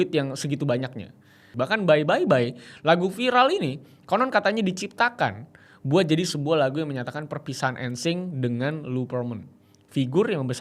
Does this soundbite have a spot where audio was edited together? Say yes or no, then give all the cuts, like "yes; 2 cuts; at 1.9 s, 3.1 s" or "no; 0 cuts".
yes; 1 cut; at 1.4 s